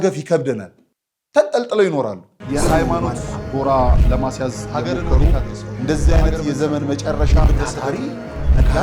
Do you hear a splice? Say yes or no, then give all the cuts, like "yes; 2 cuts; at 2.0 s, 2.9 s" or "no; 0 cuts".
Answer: yes; 1 cut; at 2.3 s